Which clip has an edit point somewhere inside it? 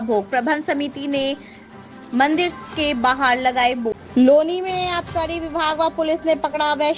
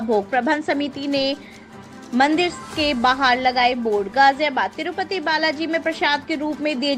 first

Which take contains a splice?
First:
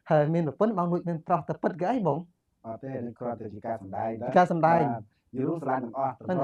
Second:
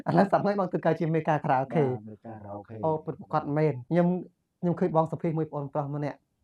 second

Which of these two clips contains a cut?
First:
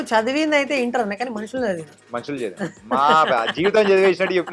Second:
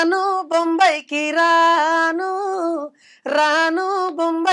first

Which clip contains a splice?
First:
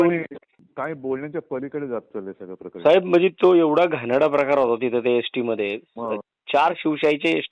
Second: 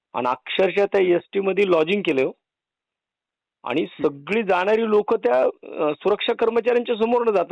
first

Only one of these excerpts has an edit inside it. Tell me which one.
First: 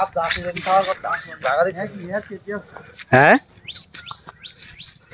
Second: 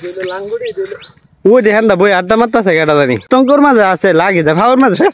second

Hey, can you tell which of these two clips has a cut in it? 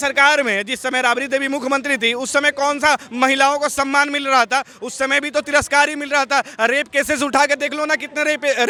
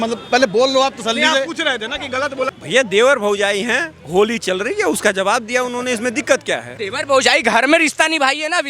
second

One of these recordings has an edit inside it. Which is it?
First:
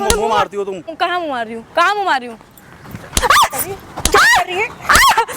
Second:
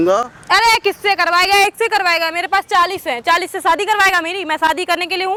first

